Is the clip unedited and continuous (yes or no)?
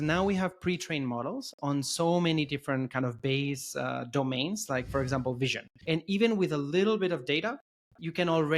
no